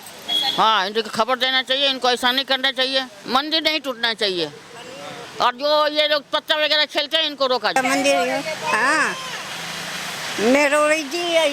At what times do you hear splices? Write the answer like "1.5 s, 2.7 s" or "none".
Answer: 3.2 s, 7.8 s